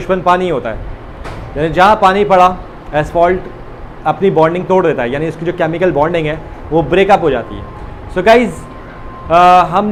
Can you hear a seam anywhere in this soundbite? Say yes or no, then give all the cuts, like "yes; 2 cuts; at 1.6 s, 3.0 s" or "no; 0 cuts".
no; 0 cuts